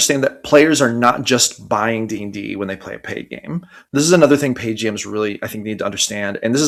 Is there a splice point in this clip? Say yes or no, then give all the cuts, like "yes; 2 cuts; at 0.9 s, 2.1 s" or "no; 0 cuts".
no; 0 cuts